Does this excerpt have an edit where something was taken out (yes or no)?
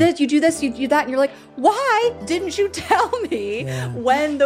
no